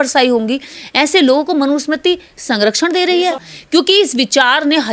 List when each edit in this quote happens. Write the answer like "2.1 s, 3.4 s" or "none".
3.5 s